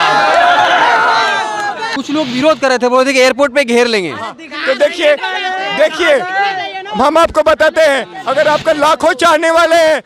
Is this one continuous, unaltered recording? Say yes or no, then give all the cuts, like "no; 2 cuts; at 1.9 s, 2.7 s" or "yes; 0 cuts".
no; 1 cut; at 1.8 s